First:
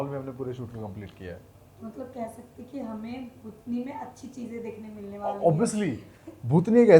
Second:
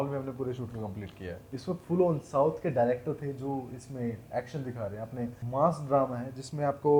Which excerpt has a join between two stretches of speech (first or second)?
second